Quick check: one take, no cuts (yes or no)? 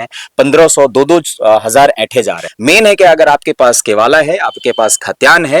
no